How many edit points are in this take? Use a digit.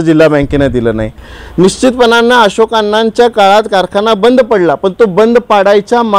1